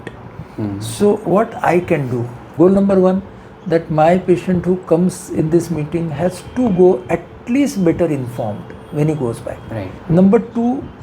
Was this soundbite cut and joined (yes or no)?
yes